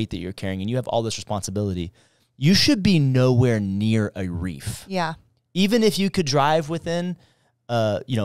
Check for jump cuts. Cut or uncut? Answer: uncut